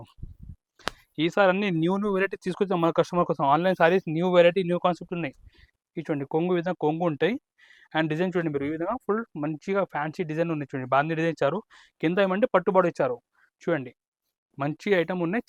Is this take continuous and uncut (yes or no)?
yes